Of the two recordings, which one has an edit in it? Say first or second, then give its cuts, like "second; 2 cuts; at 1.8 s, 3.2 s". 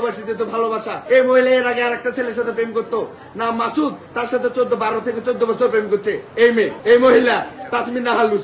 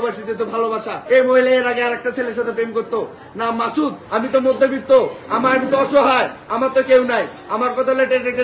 second; 1 cut; at 4.0 s